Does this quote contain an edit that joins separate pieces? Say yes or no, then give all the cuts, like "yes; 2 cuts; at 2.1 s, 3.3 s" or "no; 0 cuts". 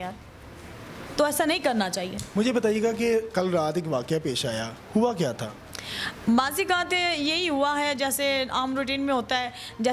no; 0 cuts